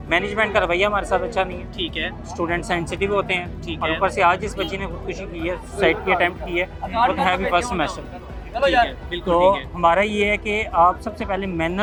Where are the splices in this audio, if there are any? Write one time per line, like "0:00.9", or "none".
none